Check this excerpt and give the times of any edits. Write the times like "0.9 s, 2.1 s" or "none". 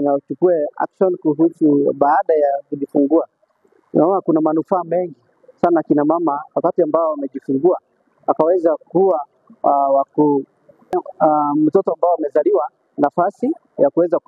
10.9 s